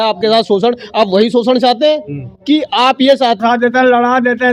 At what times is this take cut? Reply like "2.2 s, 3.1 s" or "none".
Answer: 3.4 s

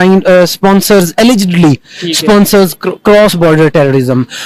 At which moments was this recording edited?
none

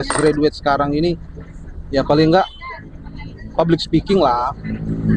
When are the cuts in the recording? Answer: none

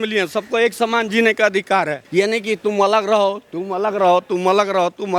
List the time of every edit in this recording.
none

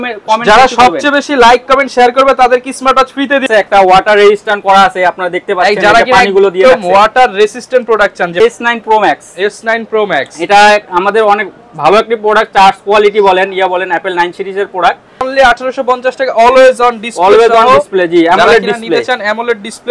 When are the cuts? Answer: 3.4 s, 8.4 s, 15.3 s

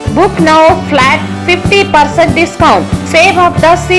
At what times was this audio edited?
none

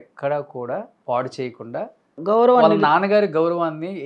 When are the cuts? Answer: 0.9 s, 2.2 s

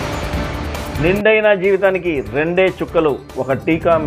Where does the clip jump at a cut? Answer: 0.9 s

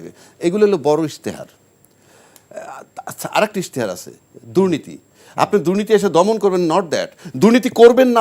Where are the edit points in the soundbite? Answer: none

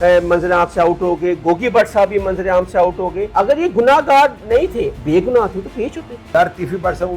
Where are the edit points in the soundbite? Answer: 3.2 s, 5.0 s, 6.2 s

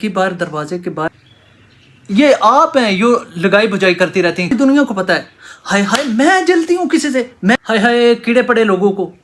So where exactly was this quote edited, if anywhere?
1.1 s, 4.5 s, 7.6 s

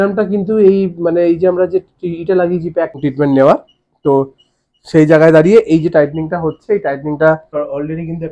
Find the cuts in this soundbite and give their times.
3.0 s, 7.5 s

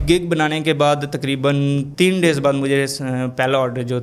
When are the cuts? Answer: none

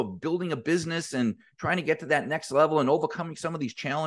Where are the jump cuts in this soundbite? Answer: none

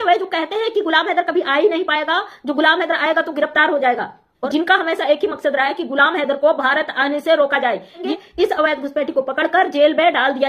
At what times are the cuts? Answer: 4.3 s, 8.0 s

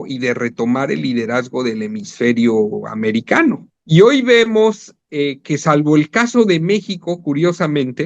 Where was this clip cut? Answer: 3.7 s

